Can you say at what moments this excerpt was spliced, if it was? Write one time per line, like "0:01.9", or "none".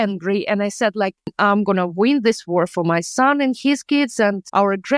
0:01.3